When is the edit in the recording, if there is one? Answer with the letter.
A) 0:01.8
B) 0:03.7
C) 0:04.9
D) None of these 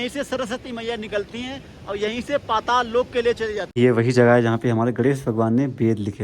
B